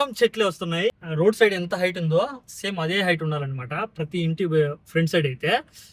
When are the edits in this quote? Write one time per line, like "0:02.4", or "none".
0:00.9